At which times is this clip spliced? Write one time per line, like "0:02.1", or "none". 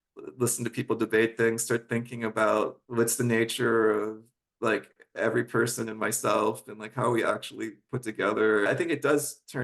0:02.8
0:08.7